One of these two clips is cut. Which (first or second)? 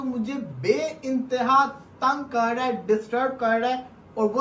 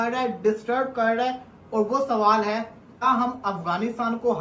second